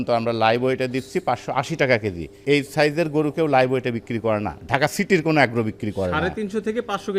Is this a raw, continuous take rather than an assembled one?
yes; 0 cuts

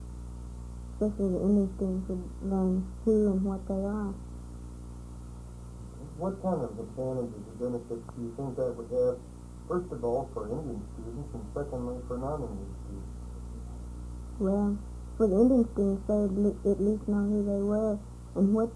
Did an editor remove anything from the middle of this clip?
no; 0 cuts

